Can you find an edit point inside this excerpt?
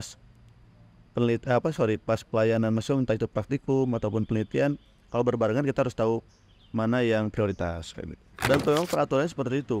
yes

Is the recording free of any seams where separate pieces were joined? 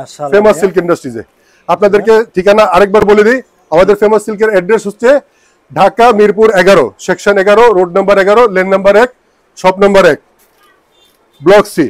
yes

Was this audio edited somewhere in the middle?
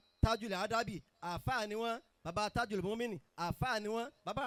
no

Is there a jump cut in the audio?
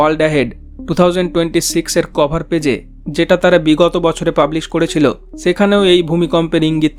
no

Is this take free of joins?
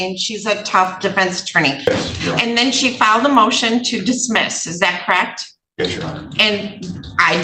no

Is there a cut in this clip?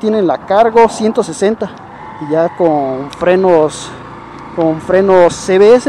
no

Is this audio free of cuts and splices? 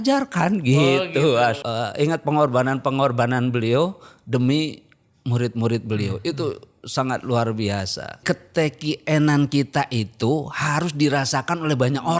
no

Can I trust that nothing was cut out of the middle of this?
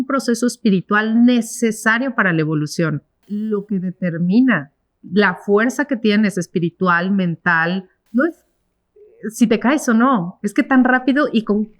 no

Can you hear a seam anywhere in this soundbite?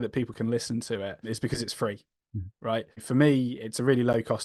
no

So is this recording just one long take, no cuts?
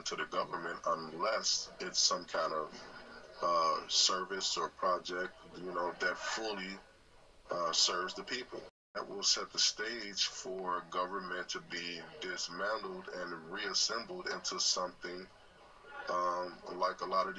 no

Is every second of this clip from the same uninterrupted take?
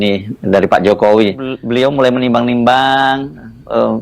no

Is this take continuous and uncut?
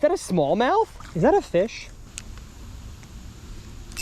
no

